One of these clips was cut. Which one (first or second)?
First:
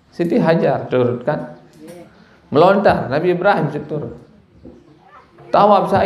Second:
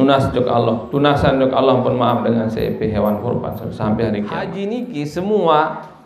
second